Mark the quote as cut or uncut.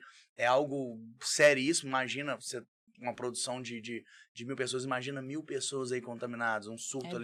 uncut